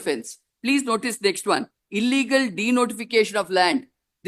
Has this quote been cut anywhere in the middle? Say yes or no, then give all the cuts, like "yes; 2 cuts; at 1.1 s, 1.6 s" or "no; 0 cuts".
no; 0 cuts